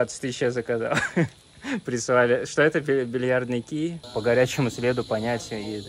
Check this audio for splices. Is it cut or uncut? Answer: cut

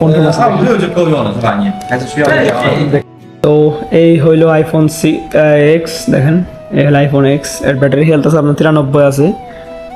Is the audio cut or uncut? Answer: uncut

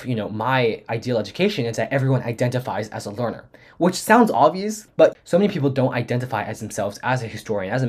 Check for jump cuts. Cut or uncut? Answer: cut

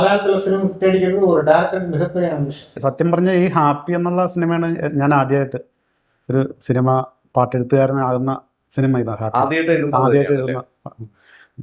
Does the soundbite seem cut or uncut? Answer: cut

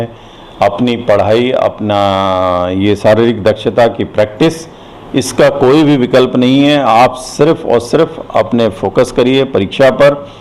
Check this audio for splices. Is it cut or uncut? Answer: uncut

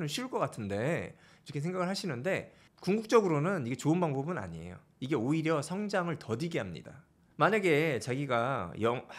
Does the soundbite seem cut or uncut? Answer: uncut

